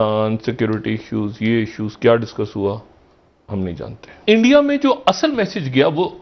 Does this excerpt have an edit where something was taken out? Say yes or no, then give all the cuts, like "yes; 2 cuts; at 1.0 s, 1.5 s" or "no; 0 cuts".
yes; 1 cut; at 4.1 s